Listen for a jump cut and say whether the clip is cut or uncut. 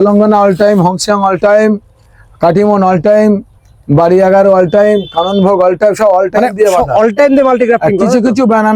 uncut